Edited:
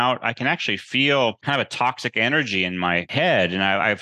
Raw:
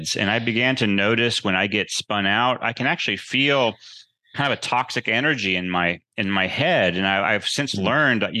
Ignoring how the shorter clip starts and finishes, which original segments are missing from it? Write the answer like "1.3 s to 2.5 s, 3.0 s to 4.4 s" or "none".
3.8 s to 4.3 s, 6.0 s to 6.5 s